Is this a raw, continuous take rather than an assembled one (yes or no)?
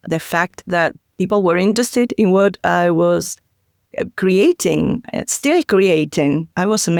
yes